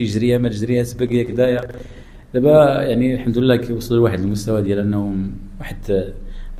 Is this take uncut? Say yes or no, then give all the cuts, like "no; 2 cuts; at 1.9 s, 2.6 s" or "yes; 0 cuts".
yes; 0 cuts